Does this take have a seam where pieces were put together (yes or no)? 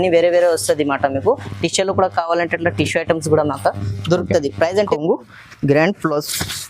yes